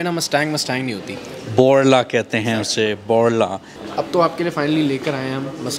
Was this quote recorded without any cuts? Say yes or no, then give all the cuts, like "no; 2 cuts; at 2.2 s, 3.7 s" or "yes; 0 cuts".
no; 1 cut; at 3.7 s